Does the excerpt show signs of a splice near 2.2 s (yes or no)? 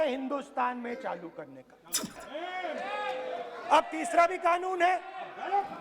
yes